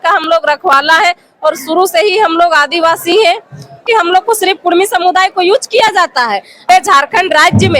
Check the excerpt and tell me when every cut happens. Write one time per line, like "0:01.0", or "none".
0:03.8
0:06.7